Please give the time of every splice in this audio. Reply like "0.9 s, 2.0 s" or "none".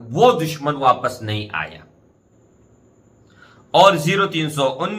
2.2 s